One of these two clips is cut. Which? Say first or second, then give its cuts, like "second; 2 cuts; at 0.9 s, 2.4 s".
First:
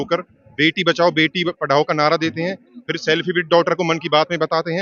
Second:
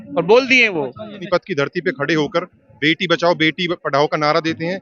second; 1 cut; at 1.2 s